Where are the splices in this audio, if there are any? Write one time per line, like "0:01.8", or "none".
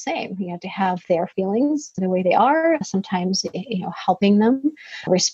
none